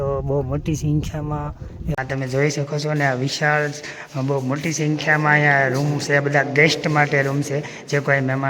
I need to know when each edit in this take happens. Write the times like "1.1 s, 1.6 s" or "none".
2.0 s

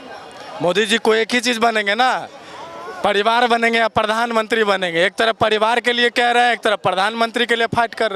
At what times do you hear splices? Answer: none

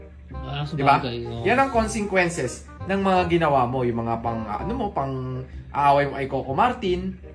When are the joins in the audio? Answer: none

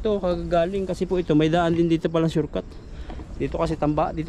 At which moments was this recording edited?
none

